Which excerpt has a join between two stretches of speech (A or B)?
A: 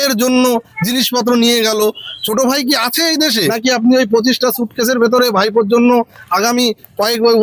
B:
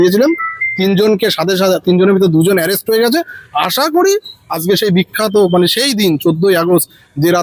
A